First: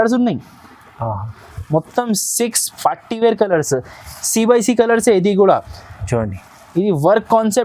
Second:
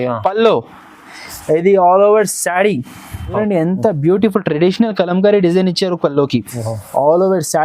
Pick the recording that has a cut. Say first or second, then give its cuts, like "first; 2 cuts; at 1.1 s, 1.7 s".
second; 1 cut; at 3.4 s